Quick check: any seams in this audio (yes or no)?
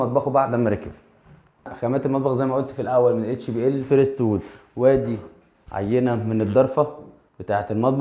yes